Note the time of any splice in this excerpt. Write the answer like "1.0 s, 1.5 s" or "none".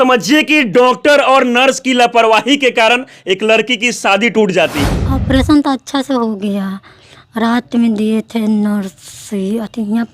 5.0 s